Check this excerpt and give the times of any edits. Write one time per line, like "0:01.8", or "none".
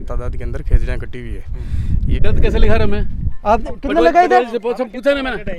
0:02.2